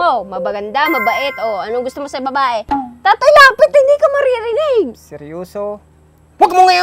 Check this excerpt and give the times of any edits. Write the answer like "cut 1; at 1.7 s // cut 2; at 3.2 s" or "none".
cut 1; at 2.9 s